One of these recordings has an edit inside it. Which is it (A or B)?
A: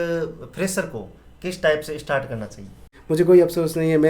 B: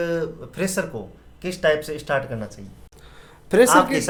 A